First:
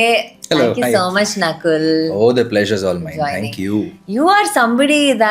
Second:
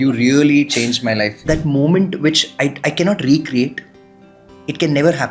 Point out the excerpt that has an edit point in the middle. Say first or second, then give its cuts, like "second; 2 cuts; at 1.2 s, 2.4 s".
second; 1 cut; at 1.4 s